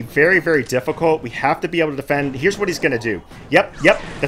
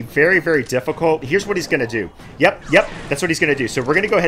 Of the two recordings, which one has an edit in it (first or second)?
second